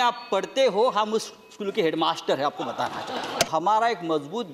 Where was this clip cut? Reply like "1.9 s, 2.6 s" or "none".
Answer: 3.5 s